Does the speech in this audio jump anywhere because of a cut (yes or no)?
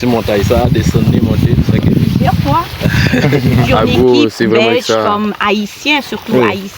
yes